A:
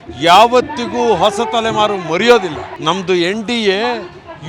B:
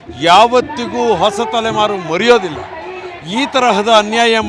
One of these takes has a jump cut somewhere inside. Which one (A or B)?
A